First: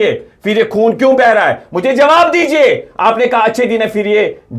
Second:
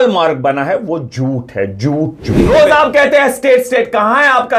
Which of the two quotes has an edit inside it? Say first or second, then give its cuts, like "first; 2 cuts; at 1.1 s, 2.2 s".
second; 1 cut; at 2.4 s